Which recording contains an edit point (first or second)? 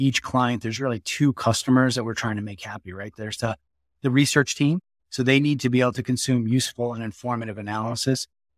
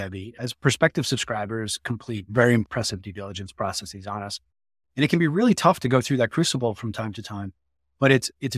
second